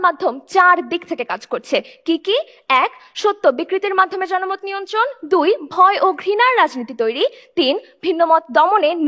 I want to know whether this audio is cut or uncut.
uncut